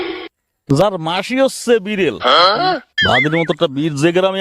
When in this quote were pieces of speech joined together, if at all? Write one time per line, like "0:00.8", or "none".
0:02.9